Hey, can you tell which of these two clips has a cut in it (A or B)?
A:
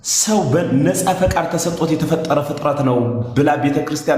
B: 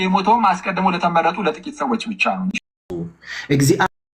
B